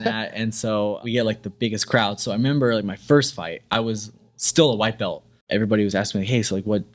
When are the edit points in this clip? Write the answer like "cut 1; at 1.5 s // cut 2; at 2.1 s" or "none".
cut 1; at 1.0 s // cut 2; at 5.4 s